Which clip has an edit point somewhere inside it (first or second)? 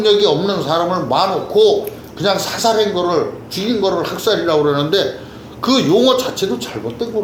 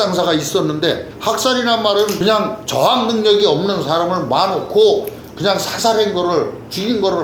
second